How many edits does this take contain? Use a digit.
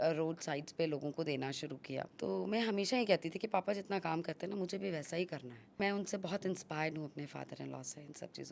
2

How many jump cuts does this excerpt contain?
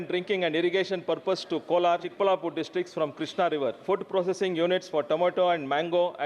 2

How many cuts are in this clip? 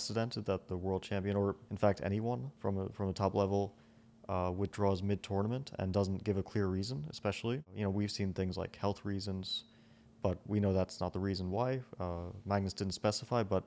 3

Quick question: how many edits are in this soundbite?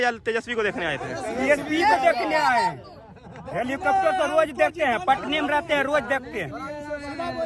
0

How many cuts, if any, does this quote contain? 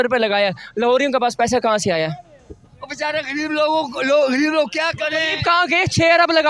0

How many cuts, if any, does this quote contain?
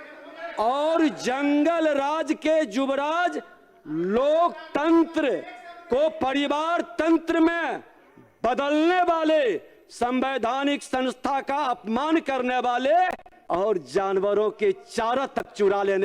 1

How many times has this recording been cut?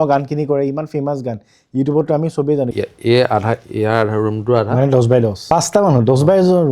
2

